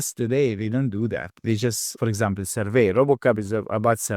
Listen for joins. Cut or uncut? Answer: cut